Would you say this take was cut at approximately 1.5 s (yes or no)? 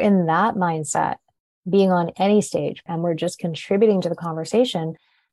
no